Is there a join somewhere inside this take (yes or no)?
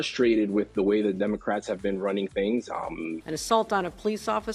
yes